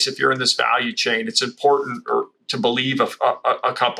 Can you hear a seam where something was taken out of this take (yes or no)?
no